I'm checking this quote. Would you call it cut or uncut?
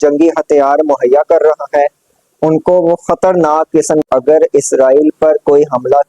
cut